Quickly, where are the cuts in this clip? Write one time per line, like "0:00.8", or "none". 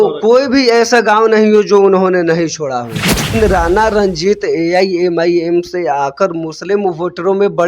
0:03.4